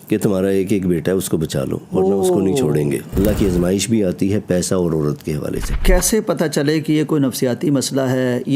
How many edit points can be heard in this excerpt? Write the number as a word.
two